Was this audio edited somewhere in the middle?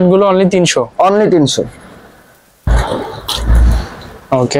no; 0 cuts

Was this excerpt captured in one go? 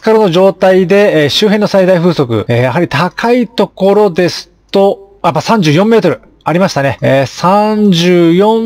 yes; 0 cuts

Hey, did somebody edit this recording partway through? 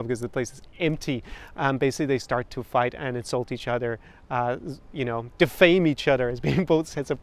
no; 0 cuts

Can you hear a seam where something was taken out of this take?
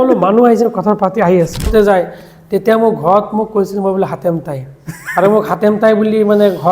yes; 1 cut; at 1.7 s

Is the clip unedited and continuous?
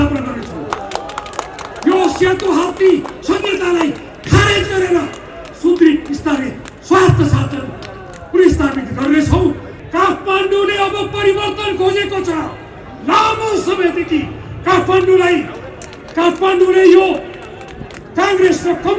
no; 1 cut; at 9.7 s

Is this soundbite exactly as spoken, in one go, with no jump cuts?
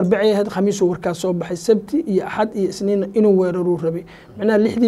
yes; 0 cuts

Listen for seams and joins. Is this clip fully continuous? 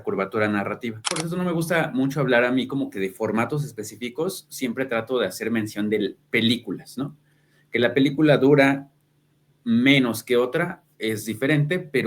no; 1 cut; at 1.1 s

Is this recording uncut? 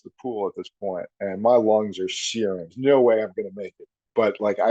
no; 1 cut; at 2.7 s

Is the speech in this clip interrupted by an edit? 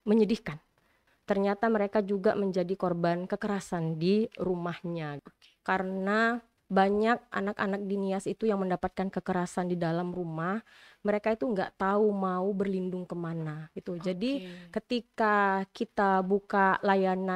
yes; 2 cuts; at 1.0 s, 5.2 s

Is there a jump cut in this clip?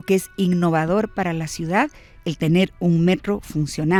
no; 0 cuts

